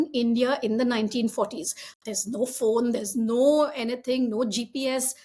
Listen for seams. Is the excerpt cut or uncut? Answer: uncut